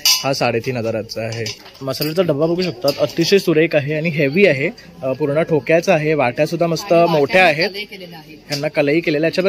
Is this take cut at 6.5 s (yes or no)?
no